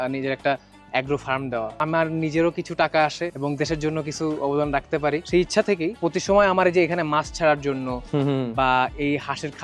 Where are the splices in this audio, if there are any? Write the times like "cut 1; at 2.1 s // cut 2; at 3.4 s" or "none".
none